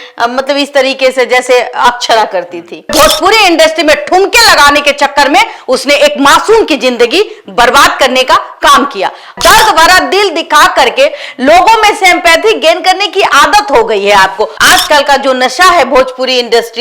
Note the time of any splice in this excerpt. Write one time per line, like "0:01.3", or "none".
0:02.9
0:09.3
0:14.5